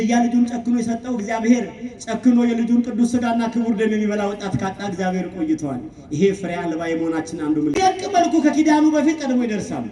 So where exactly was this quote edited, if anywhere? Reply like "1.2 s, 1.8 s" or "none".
8.0 s